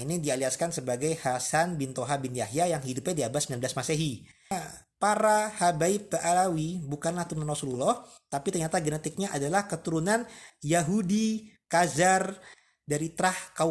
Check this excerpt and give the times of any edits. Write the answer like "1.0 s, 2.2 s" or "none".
4.5 s